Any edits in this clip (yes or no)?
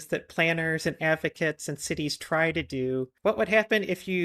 yes